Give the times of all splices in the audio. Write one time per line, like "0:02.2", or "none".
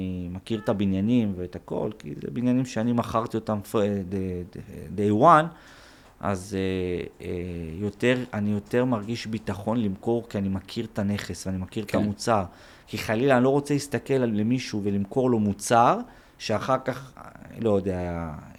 none